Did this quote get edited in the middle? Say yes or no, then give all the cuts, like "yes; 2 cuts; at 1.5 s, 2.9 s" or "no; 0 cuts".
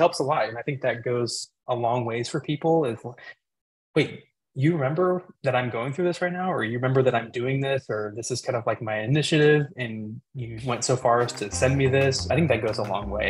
yes; 1 cut; at 12.3 s